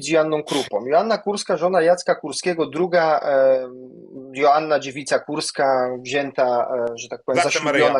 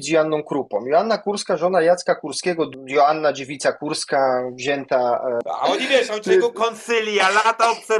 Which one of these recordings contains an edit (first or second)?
second